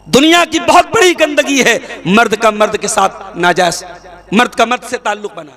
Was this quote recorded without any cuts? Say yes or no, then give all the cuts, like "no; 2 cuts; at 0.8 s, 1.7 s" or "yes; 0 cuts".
yes; 0 cuts